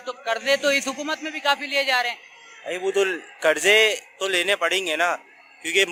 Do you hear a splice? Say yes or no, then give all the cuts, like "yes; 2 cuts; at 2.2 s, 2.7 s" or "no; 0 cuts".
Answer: no; 0 cuts